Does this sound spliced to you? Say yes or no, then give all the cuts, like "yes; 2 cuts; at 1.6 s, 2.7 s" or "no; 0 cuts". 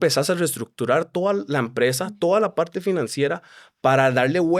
no; 0 cuts